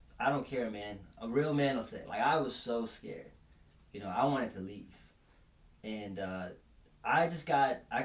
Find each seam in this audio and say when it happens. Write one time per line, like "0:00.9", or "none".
none